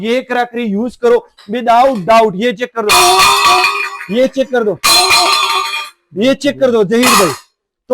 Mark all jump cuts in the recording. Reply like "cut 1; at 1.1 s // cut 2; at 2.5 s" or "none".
none